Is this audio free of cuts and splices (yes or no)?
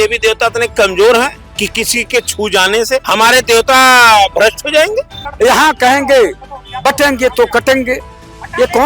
no